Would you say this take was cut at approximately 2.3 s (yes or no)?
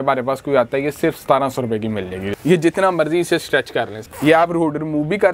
yes